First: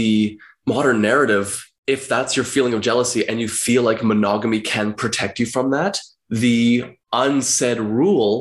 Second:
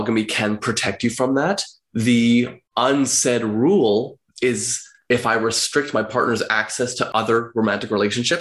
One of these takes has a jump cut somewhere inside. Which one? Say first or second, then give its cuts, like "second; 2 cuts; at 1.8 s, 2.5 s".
second; 2 cuts; at 5.0 s, 7.0 s